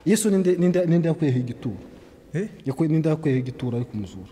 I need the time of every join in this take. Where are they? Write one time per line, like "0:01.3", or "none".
none